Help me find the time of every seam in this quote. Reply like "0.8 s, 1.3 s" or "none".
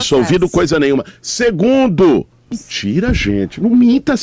2.4 s